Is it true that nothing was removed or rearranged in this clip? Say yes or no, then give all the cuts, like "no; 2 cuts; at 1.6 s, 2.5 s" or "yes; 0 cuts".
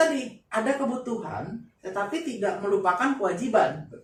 yes; 0 cuts